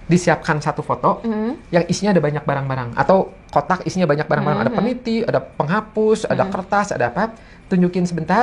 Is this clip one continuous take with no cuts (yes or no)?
yes